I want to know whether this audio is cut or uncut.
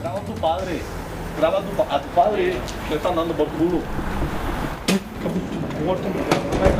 uncut